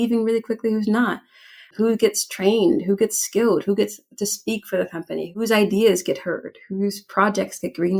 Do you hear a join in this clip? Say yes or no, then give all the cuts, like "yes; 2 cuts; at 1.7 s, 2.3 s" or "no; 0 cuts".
no; 0 cuts